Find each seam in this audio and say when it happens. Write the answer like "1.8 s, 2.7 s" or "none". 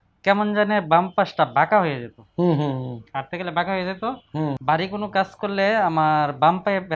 4.5 s